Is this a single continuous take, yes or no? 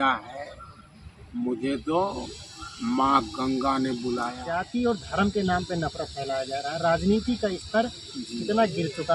no